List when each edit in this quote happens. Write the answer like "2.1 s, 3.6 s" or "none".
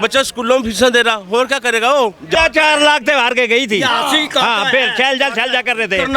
2.3 s